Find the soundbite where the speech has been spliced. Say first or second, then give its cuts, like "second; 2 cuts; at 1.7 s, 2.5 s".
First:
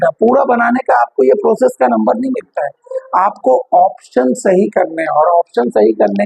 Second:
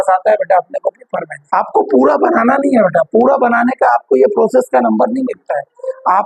second; 1 cut; at 1.4 s